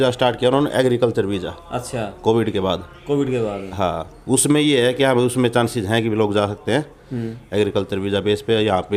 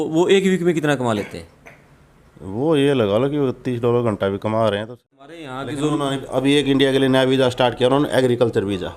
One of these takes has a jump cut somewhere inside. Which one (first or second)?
second